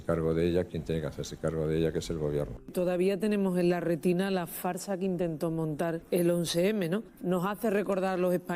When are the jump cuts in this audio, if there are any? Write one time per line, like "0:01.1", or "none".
0:02.6
0:06.0